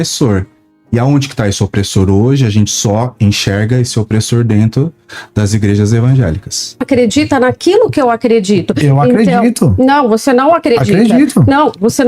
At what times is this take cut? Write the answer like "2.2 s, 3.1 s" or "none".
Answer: 6.8 s